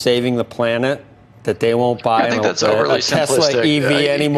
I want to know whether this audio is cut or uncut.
uncut